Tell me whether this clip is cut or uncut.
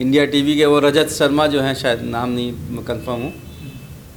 uncut